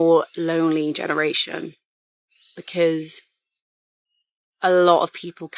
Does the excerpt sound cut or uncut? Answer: uncut